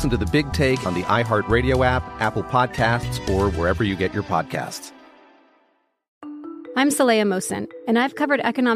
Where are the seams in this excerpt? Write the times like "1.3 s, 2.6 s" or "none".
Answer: 6.0 s